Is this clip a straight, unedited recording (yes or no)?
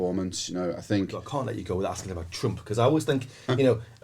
no